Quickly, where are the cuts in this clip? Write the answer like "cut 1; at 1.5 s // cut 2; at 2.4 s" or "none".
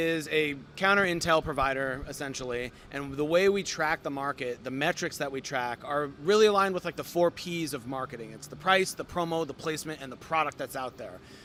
none